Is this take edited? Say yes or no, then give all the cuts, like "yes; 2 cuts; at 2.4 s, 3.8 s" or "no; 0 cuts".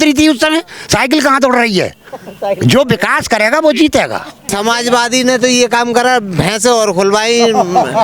yes; 1 cut; at 4.5 s